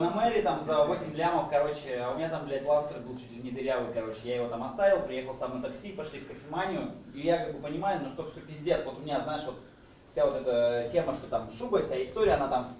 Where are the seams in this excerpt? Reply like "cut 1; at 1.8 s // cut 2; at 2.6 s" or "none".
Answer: none